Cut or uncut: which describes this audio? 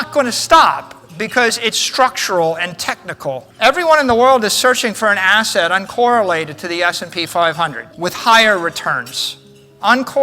cut